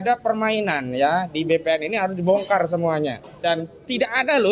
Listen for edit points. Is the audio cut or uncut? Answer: cut